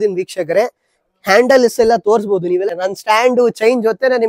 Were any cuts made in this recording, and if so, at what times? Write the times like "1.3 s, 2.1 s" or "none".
2.7 s